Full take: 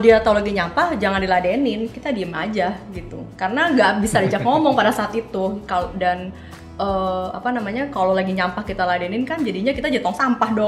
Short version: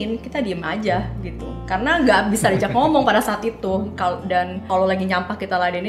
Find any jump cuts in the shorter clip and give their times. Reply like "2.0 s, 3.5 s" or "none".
4.6 s